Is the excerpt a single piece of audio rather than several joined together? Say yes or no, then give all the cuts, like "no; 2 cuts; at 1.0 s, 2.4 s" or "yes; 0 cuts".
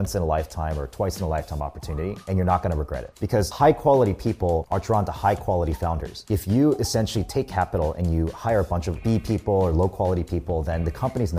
yes; 0 cuts